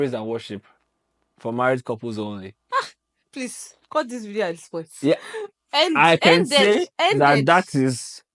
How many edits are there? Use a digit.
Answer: 0